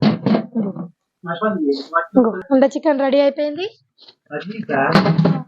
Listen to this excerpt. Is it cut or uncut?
cut